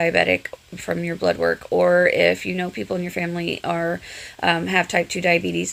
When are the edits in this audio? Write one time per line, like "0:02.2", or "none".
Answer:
none